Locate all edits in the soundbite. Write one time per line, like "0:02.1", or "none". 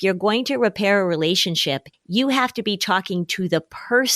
0:01.9

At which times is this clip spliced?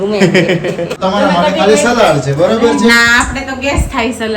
0:01.0

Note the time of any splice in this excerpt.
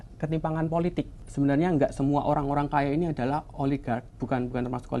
0:01.2

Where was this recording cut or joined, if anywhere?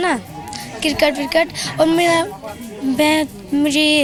none

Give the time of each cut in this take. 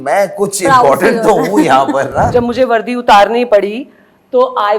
0:02.3
0:03.5

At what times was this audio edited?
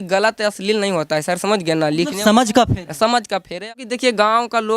0:03.7

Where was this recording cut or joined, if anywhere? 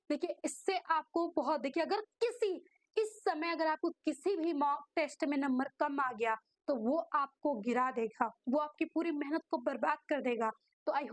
none

